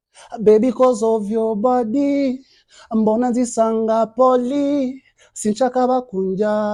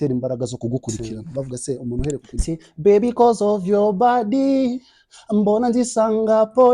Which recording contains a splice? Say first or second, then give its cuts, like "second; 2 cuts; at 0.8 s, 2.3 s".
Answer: second; 1 cut; at 2.3 s